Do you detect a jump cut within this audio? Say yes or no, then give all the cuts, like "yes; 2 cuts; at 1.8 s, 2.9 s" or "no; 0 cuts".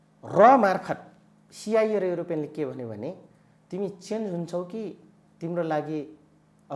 no; 0 cuts